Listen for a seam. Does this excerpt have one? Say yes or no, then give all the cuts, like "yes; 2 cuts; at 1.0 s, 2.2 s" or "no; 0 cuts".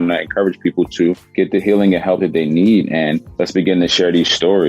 yes; 2 cuts; at 1.2 s, 3.3 s